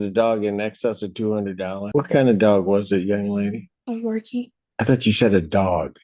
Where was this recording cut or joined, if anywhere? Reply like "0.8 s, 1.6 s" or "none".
1.9 s, 4.6 s

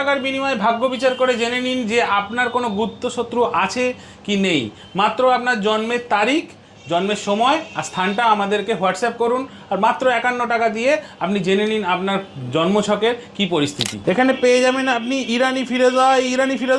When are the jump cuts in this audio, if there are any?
none

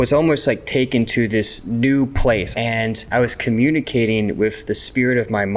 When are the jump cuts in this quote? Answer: 1.6 s, 2.5 s

